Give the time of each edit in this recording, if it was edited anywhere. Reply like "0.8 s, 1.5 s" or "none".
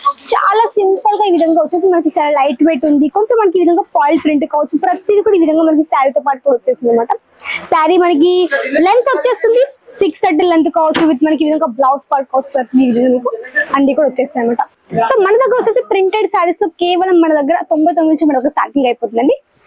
14.8 s